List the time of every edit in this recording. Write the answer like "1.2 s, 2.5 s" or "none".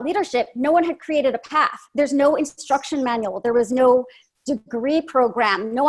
none